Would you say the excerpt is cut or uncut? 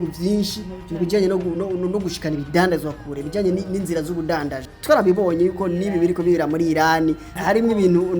cut